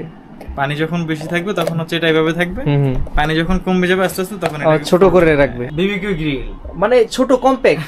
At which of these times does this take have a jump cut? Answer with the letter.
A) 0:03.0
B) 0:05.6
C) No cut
B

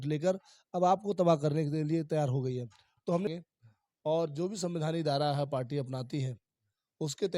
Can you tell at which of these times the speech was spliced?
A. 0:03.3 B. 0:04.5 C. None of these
A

